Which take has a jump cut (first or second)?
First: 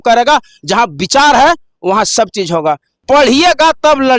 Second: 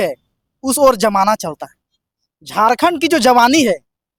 first